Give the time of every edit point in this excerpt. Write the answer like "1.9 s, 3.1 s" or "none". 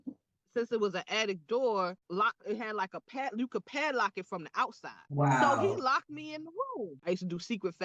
7.0 s